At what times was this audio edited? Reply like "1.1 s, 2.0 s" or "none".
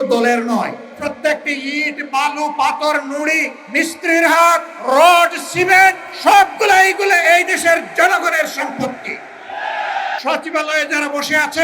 1.0 s, 3.6 s, 4.7 s, 6.1 s, 10.2 s